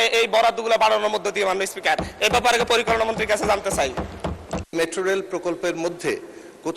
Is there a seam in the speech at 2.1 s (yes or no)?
no